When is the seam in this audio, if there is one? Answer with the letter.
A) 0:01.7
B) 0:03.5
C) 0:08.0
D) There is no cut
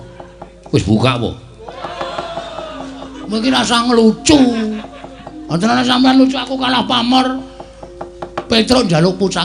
D